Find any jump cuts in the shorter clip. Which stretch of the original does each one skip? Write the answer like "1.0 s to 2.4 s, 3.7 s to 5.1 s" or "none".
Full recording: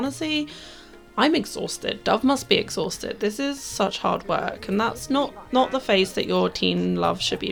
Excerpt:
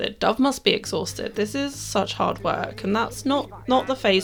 none